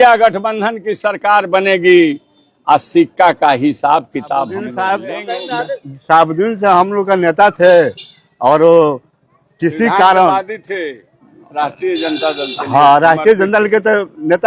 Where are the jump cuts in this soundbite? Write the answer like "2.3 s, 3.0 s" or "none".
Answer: 4.6 s